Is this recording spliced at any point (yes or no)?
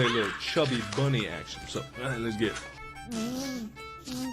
yes